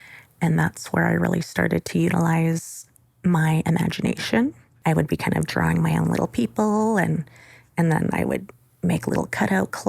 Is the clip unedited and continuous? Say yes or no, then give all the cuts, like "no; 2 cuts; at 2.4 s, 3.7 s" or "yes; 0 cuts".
no; 1 cut; at 4.7 s